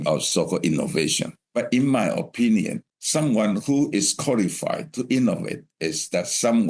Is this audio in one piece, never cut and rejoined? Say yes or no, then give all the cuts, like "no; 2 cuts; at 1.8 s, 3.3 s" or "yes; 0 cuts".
no; 2 cuts; at 1.4 s, 2.8 s